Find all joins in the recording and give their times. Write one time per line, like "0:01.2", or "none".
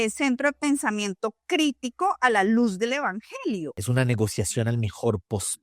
0:03.8